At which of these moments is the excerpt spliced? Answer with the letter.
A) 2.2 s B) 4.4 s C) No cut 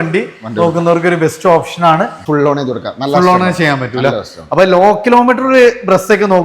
A